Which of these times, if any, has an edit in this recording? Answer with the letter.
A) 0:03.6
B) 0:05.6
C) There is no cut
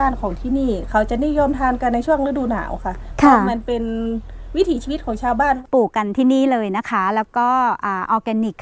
B